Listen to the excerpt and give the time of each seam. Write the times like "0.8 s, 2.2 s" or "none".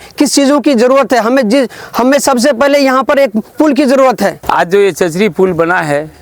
4.4 s

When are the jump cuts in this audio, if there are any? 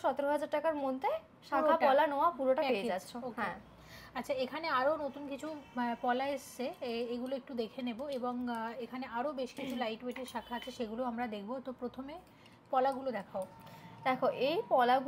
none

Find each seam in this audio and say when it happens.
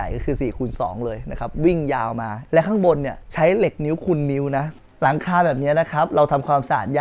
4.7 s

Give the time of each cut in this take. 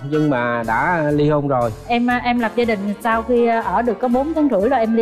1.8 s

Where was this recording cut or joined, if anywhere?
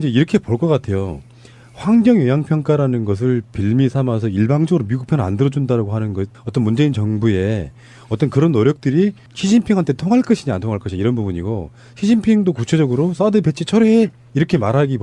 2.8 s

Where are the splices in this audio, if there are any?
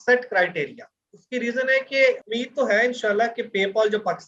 2.2 s

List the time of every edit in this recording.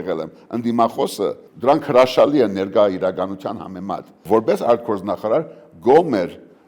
1.5 s, 4.2 s

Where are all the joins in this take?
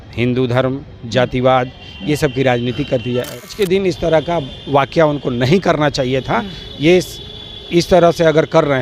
3.6 s

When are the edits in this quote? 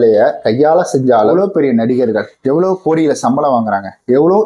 1.2 s

